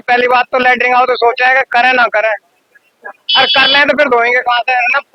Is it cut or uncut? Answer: uncut